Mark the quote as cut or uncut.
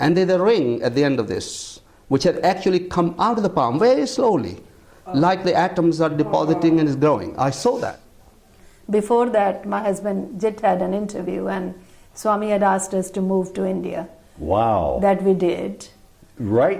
cut